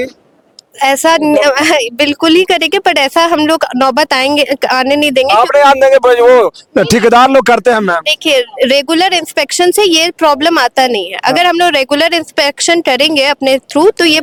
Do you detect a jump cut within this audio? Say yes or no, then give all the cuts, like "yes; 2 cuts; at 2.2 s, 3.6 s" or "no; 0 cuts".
no; 0 cuts